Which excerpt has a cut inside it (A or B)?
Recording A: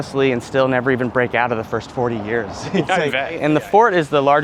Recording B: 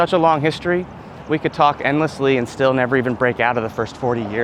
A